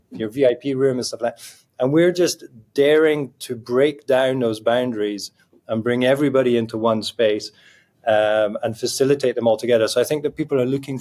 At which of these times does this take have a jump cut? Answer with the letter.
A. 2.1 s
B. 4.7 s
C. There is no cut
C